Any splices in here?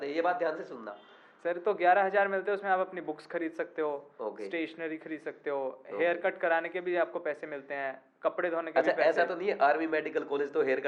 no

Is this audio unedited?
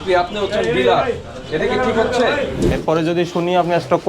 no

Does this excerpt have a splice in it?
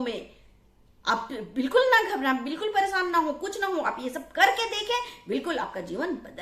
no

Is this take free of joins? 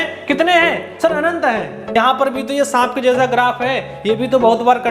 no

